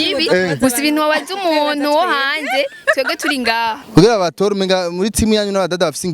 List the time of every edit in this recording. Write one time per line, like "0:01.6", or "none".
0:03.8